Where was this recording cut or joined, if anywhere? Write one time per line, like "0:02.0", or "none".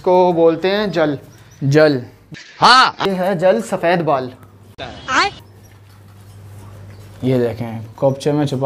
none